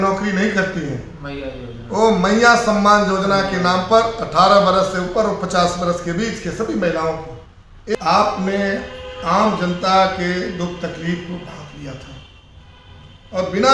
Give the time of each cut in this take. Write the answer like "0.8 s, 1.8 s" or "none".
7.9 s